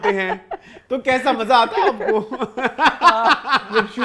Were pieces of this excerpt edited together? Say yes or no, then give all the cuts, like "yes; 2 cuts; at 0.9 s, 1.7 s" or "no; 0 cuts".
no; 0 cuts